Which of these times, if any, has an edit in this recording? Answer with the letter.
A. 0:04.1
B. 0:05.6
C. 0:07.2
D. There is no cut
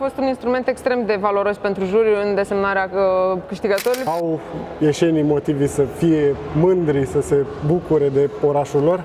A